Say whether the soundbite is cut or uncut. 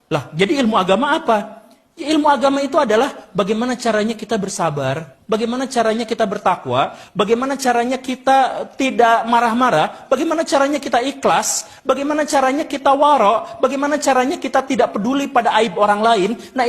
cut